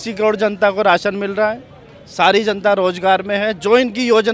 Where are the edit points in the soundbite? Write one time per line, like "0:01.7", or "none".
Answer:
none